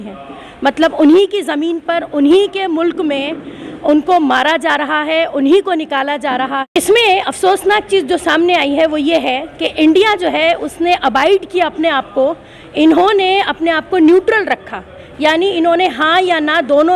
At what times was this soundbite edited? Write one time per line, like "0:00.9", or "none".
0:06.7

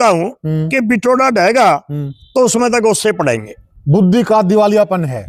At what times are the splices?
none

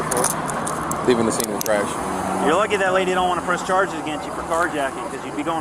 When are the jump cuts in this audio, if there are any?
0:02.0

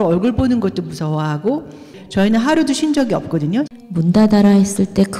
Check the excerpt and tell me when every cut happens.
0:01.9
0:03.7

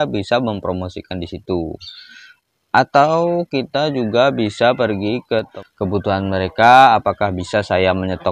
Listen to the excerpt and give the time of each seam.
0:05.6

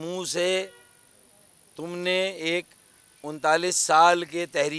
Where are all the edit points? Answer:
none

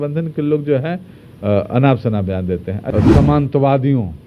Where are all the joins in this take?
0:02.8

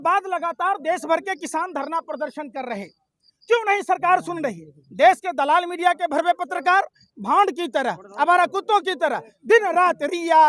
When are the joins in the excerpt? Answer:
none

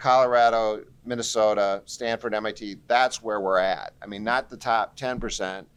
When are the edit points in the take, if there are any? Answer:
none

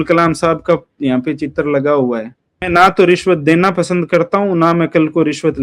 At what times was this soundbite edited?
0:02.7

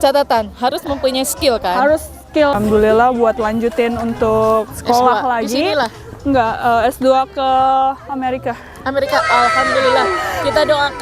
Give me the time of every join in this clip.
0:02.6

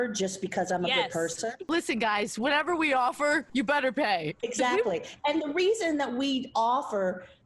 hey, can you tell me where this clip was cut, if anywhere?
0:01.6
0:04.4

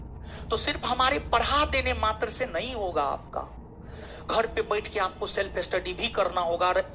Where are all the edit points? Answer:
none

